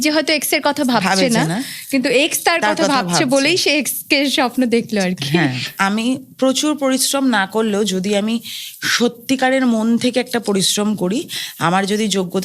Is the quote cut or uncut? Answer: cut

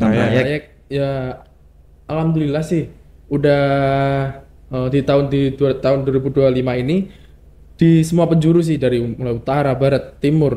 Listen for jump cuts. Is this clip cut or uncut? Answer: uncut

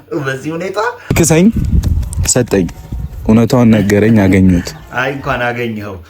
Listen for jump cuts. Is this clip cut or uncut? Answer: cut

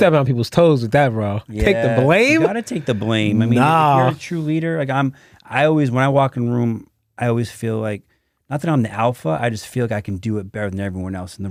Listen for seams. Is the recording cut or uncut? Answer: uncut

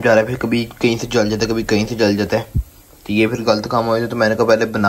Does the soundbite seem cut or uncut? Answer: uncut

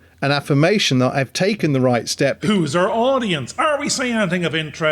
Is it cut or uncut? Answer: cut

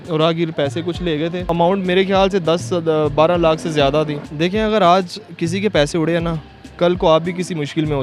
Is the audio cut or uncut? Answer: cut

